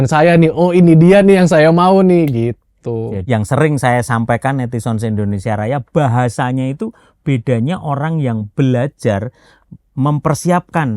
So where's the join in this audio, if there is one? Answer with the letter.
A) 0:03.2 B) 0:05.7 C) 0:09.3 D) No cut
A